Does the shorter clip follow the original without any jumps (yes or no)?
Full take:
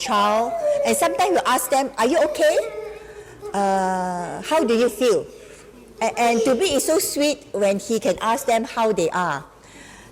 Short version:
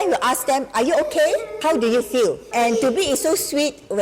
no